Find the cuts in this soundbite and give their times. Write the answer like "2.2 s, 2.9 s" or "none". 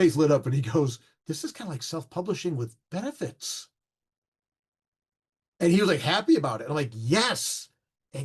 1.1 s